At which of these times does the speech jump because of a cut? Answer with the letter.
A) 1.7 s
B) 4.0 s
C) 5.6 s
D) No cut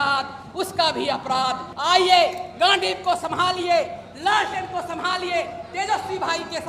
A